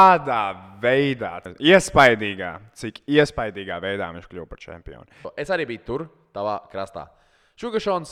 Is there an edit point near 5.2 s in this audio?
yes; 2 cuts; at 1.4 s, 5.2 s

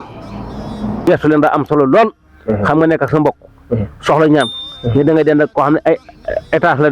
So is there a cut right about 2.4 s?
no; 1 cut; at 1.0 s

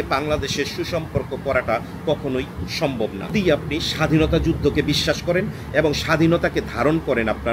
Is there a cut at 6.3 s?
no; 1 cut; at 3.6 s

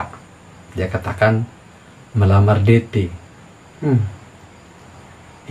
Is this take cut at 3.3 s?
no; 0 cuts

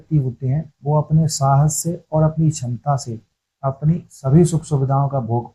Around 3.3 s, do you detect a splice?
no; 0 cuts

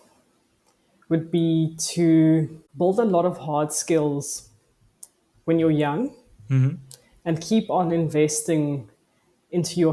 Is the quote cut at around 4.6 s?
no; 1 cut; at 2.6 s

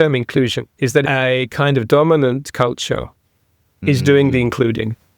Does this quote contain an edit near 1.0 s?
yes; 1 cut; at 1.0 s

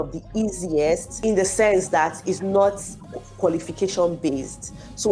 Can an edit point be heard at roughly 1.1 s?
yes; 1 cut; at 1.1 s

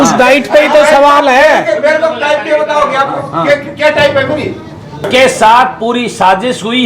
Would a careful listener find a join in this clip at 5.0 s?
yes; 1 cut; at 5.0 s

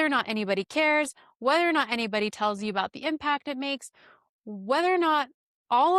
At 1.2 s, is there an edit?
no; 0 cuts

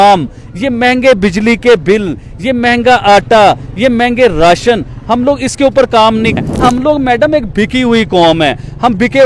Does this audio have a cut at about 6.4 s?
yes; 1 cut; at 6.4 s

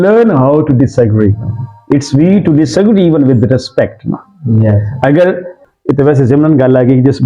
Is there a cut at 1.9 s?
no; 1 cut; at 5.6 s

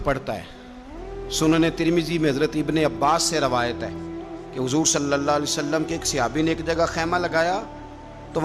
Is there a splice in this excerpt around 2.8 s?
no; 0 cuts

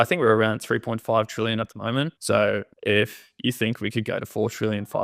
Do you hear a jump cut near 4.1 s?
no; 2 cuts; at 2.2 s, 2.7 s

